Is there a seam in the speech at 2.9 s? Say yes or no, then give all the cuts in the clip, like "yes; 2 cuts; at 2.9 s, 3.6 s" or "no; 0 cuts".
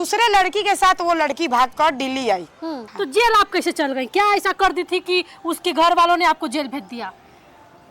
yes; 1 cut; at 2.9 s